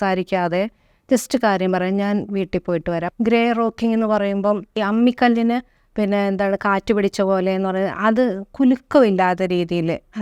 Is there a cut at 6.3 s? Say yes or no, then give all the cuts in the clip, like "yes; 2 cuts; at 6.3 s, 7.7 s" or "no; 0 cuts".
no; 2 cuts; at 3.1 s, 4.8 s